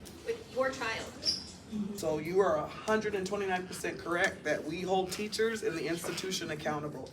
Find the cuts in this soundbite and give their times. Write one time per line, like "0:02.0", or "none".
0:02.0